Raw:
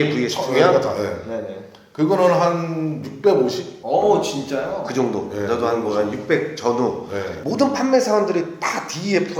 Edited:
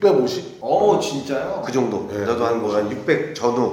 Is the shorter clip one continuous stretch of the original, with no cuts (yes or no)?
yes